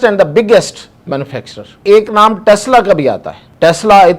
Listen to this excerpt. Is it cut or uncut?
cut